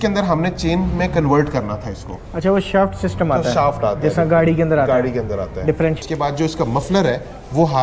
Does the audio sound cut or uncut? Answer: cut